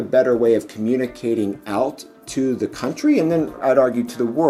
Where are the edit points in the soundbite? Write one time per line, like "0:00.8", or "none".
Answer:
none